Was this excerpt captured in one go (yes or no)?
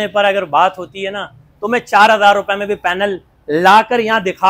yes